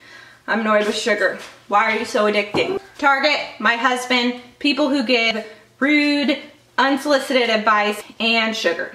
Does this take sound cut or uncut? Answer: cut